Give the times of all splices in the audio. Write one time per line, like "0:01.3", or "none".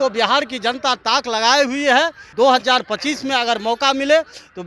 0:02.3